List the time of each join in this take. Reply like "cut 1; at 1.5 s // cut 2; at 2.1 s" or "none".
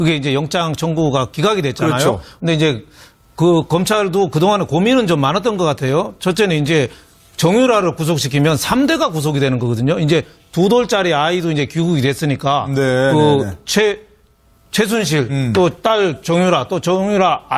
cut 1; at 9.4 s